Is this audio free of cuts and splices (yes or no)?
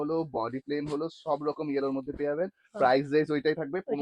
yes